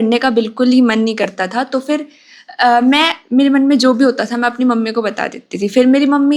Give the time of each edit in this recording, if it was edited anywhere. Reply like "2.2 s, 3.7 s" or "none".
none